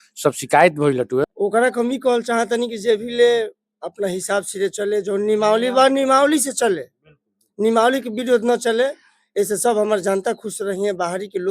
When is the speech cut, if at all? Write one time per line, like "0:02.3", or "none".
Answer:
0:01.2